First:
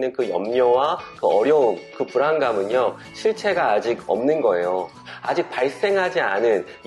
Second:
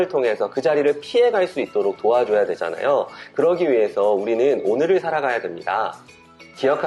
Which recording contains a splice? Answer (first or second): first